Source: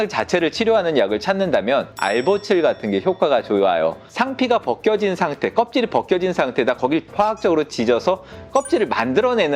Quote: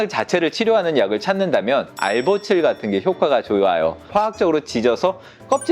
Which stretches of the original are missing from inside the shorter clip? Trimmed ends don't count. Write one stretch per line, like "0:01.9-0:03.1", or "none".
0:04.0-0:07.1